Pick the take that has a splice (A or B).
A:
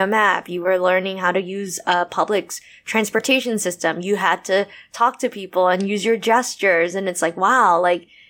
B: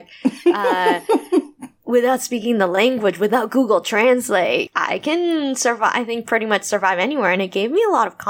B